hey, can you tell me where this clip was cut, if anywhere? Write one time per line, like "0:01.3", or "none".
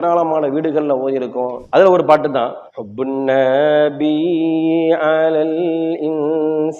0:01.6